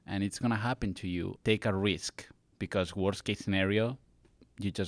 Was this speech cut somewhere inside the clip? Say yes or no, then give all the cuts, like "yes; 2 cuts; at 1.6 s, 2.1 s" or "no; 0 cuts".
yes; 1 cut; at 1.3 s